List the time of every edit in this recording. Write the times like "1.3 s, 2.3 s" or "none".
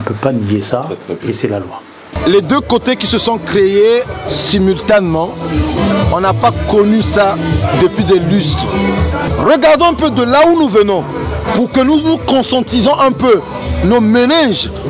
2.0 s, 9.3 s